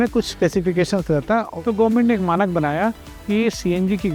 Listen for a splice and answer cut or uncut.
cut